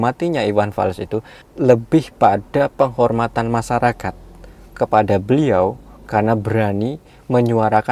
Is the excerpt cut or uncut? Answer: uncut